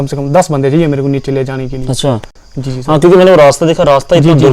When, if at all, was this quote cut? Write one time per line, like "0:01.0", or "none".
none